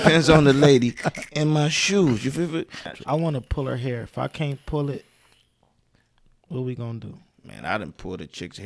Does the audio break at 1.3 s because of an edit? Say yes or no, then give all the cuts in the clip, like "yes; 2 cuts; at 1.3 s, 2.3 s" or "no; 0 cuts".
no; 1 cut; at 2.8 s